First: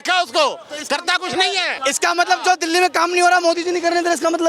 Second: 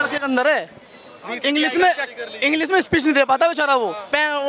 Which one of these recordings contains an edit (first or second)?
first